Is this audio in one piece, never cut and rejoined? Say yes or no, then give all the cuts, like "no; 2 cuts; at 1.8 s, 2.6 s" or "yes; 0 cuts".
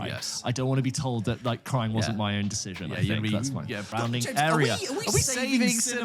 no; 1 cut; at 3.9 s